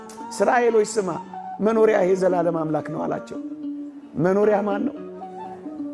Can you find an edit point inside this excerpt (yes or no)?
no